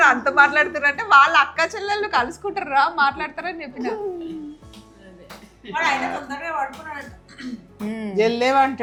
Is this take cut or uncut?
uncut